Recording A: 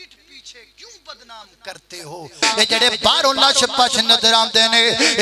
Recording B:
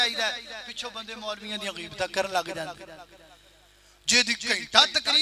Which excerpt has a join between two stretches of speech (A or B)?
A